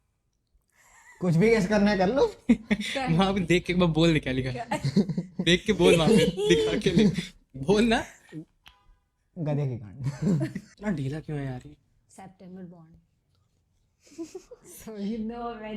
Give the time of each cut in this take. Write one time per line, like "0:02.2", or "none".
0:10.7